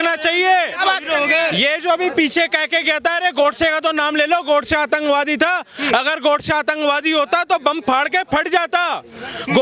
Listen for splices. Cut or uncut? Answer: uncut